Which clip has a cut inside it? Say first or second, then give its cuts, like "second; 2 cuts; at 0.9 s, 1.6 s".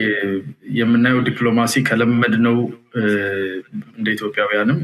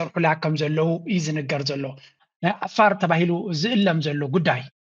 second; 1 cut; at 2.2 s